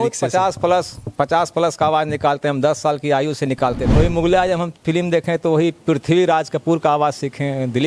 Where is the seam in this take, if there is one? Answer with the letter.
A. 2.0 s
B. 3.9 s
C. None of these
B